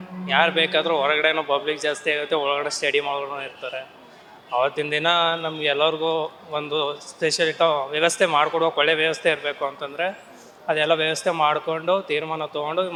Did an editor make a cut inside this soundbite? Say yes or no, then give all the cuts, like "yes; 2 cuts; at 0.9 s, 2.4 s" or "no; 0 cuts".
no; 0 cuts